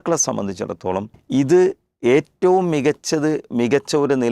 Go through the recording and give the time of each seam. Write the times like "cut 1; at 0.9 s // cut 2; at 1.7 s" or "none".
cut 1; at 1.1 s